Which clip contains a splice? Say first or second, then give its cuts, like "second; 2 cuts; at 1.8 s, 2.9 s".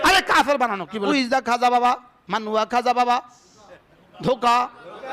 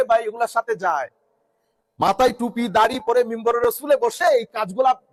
first; 1 cut; at 1.1 s